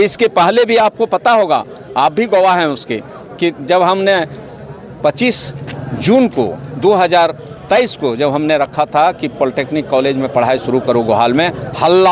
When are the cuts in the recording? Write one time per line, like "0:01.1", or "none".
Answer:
none